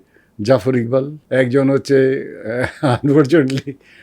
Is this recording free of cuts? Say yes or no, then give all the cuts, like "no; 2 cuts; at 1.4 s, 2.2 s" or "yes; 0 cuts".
no; 1 cut; at 1.2 s